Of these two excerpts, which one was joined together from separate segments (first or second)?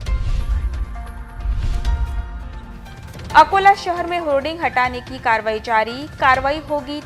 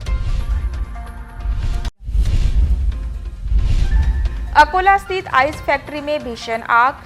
second